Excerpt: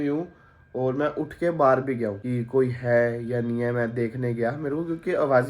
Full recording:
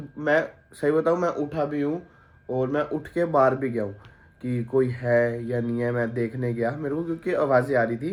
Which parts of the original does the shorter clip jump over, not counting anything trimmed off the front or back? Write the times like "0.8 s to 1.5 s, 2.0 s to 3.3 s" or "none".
3.9 s to 4.4 s